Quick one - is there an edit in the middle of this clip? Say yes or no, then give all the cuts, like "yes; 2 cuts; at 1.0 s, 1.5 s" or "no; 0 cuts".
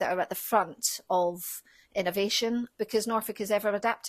yes; 1 cut; at 2.7 s